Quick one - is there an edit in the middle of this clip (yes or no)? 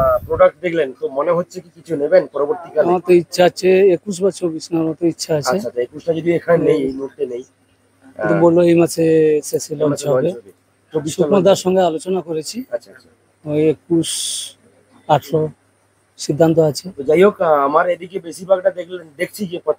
no